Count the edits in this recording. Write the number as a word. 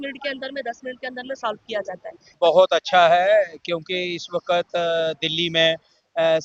one